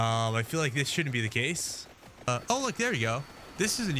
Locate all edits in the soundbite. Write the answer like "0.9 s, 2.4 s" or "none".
2.3 s